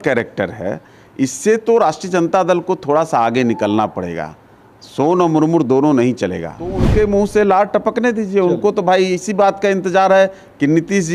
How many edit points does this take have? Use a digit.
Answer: 1